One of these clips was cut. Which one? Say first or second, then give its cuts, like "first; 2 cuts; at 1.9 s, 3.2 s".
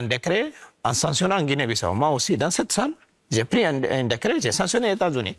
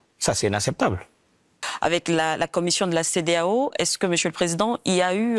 second; 1 cut; at 1.6 s